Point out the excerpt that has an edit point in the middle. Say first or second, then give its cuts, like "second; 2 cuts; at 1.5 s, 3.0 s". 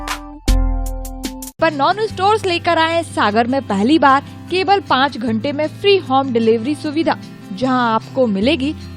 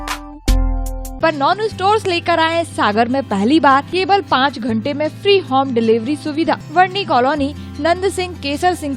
second; 3 cuts; at 1.1 s, 3.9 s, 6.6 s